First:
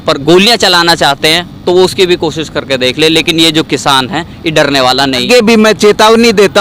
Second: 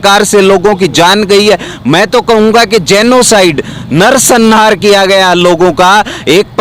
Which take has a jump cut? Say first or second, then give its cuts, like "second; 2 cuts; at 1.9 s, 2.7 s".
first; 1 cut; at 5.2 s